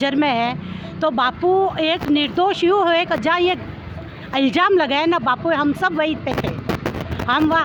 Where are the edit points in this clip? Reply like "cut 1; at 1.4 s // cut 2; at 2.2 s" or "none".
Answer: none